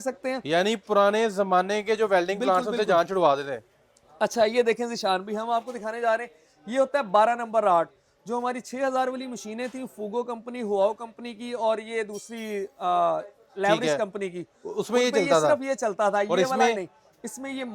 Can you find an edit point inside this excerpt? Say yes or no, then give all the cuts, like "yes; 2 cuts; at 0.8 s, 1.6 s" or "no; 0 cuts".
no; 0 cuts